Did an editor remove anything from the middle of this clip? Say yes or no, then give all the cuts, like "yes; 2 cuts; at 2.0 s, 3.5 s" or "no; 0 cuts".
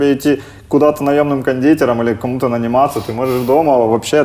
no; 0 cuts